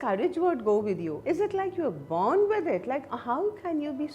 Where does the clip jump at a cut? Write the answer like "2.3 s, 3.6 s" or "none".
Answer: 1.1 s